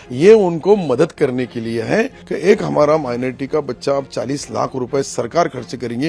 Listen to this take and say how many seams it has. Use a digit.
1